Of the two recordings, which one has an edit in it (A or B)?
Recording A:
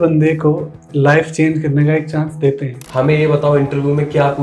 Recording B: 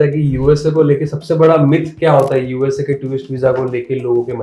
A